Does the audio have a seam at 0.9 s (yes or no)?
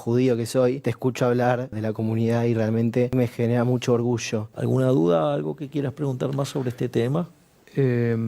yes